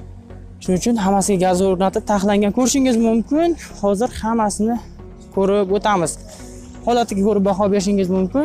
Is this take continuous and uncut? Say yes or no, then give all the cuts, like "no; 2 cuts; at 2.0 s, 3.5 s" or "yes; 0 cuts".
yes; 0 cuts